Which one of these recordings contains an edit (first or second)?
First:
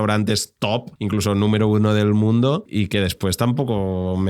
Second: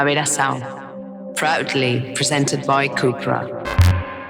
first